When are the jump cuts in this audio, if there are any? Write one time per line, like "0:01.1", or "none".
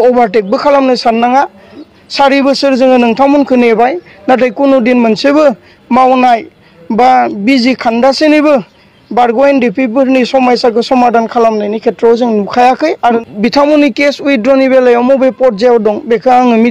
0:01.9
0:13.2